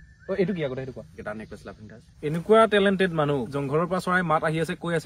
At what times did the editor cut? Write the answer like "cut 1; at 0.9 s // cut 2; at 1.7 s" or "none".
cut 1; at 1.6 s // cut 2; at 3.5 s